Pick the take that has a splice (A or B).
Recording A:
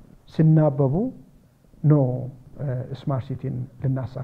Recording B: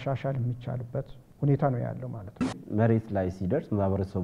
B